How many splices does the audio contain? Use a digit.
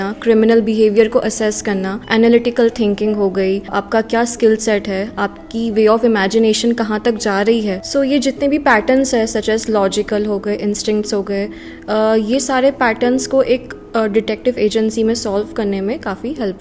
3